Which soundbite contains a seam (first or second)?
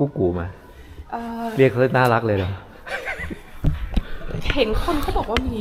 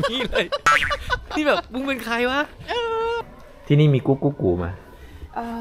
second